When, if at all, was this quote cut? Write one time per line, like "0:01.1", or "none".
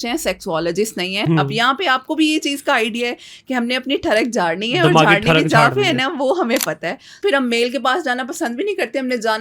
0:01.2
0:07.2